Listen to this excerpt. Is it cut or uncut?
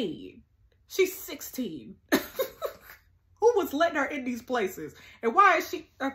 uncut